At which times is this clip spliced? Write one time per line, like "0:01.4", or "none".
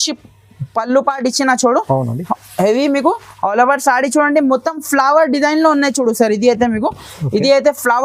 none